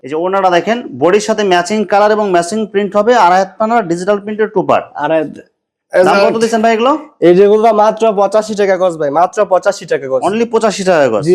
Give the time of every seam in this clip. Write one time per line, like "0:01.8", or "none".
none